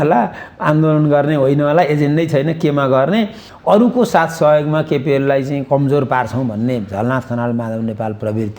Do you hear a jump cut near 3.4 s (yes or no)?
yes